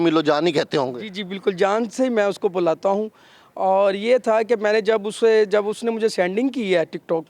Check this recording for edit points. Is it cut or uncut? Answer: uncut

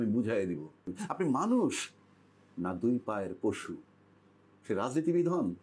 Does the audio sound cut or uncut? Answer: cut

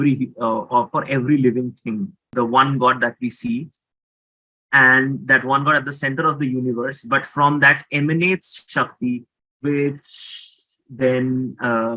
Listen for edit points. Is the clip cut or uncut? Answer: cut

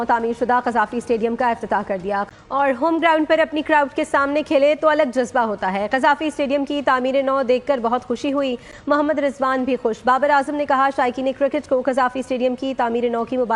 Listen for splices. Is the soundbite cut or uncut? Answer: uncut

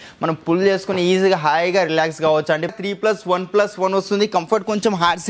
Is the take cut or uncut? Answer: cut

